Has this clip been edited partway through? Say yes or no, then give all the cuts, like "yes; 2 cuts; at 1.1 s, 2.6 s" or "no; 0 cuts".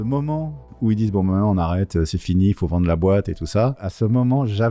no; 0 cuts